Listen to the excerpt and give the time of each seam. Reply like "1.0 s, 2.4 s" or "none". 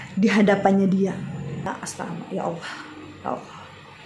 1.7 s